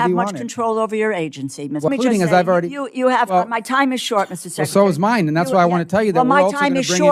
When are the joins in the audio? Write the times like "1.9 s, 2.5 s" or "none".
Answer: 1.9 s